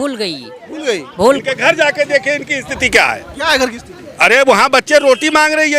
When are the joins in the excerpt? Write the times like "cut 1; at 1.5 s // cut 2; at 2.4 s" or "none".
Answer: cut 1; at 1.4 s